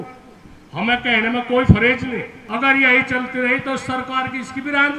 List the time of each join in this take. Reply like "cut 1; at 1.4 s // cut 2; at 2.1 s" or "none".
cut 1; at 2.4 s